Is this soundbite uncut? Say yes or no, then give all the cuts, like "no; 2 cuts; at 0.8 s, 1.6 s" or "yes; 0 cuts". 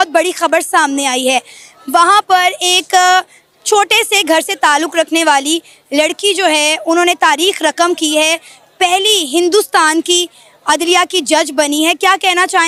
yes; 0 cuts